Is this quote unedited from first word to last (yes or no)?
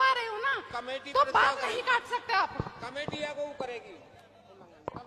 yes